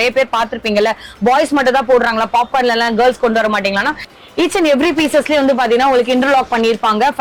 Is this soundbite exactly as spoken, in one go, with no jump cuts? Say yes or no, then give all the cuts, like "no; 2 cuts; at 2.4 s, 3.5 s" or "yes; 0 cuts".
no; 1 cut; at 4.1 s